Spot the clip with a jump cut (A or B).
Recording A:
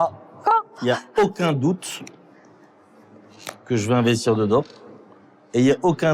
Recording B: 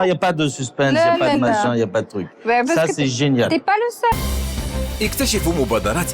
B